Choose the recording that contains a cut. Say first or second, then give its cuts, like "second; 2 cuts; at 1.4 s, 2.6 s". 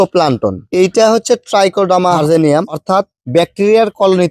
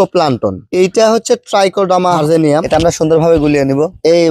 second; 1 cut; at 2.6 s